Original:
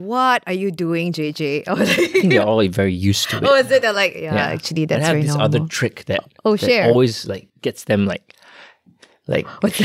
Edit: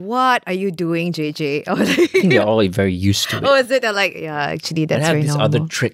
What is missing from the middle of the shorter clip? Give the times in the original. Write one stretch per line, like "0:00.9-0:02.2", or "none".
none